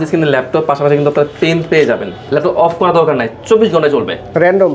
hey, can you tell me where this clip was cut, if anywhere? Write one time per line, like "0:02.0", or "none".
0:02.1